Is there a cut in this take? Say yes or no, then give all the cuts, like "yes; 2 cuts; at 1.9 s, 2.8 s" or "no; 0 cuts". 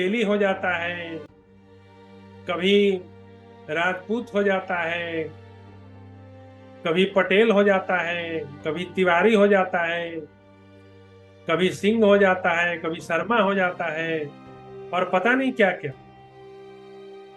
no; 0 cuts